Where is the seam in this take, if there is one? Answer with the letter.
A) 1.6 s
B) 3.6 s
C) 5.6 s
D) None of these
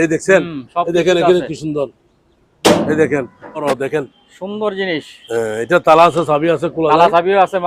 B